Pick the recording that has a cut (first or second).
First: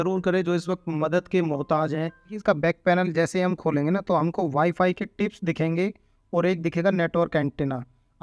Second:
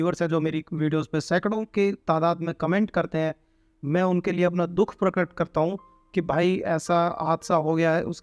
first